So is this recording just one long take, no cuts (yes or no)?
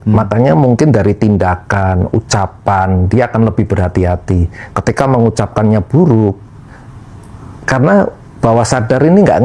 yes